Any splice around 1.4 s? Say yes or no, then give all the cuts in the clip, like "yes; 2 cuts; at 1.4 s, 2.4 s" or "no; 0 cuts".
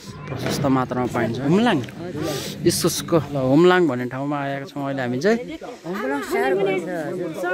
yes; 3 cuts; at 1.4 s, 2.5 s, 3.3 s